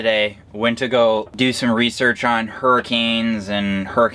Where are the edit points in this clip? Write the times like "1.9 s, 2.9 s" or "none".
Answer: 1.3 s

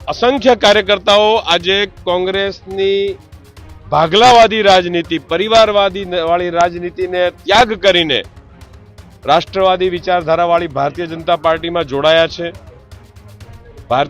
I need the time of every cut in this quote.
none

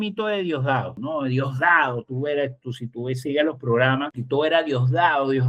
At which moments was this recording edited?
0.9 s, 4.2 s

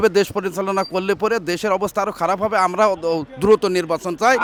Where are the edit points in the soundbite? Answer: none

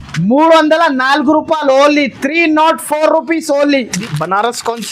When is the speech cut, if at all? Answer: 3.9 s

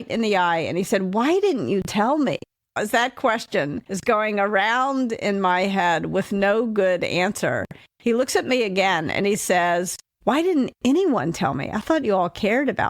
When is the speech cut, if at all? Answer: 2.8 s, 3.9 s, 10.0 s

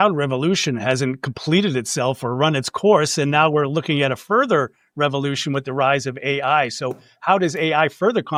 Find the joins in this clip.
none

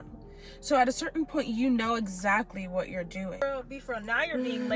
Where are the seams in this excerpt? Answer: 3.4 s

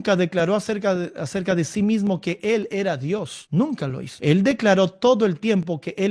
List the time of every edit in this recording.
none

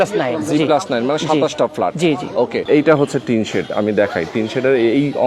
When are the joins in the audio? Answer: 2.6 s

